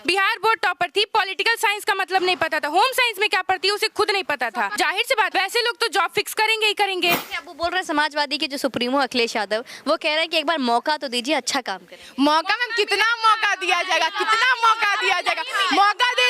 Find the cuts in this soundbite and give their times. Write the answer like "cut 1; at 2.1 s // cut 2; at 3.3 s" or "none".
cut 1; at 5.2 s // cut 2; at 7.3 s